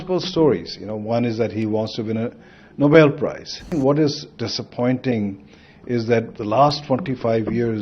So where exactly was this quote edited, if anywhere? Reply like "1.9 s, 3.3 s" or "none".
3.7 s

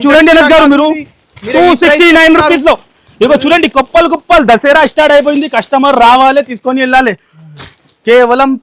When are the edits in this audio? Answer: none

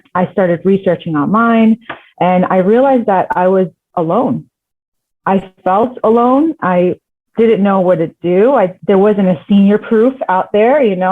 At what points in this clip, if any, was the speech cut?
8.8 s

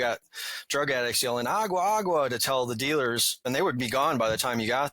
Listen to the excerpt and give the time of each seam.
3.4 s

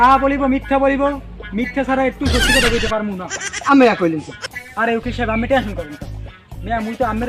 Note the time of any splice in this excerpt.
3.5 s

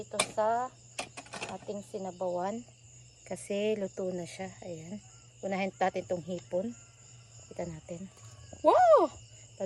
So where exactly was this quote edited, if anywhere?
none

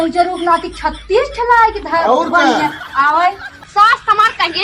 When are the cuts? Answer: 3.5 s

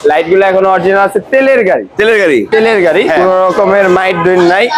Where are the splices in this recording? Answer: 3.2 s

